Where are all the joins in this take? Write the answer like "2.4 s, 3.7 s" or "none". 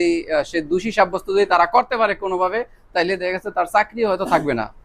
none